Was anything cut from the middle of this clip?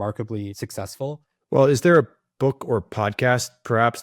yes; 1 cut; at 1.3 s

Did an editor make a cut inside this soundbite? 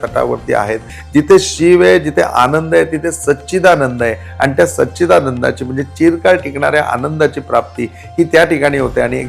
yes; 1 cut; at 0.9 s

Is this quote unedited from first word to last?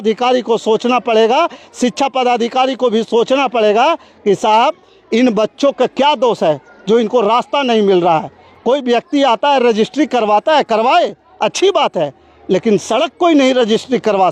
yes; 0 cuts

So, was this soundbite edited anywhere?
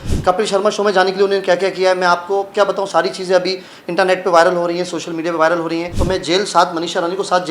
yes; 1 cut; at 5.9 s

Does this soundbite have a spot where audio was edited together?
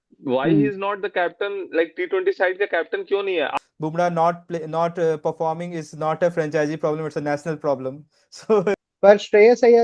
yes; 2 cuts; at 3.5 s, 8.8 s

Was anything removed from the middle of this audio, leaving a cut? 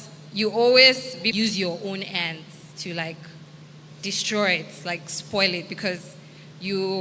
yes; 1 cut; at 1.3 s

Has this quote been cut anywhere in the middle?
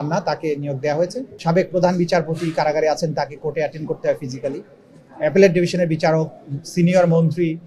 yes; 1 cut; at 1.3 s

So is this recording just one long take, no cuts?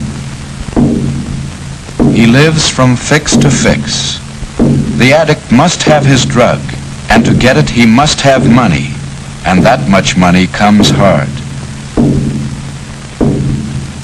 no; 1 cut; at 10.5 s

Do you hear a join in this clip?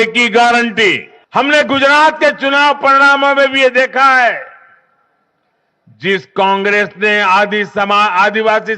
yes; 1 cut; at 1.1 s

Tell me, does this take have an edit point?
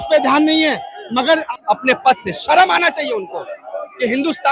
yes; 1 cut; at 1.4 s

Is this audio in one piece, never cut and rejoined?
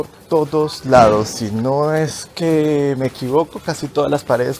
yes; 0 cuts

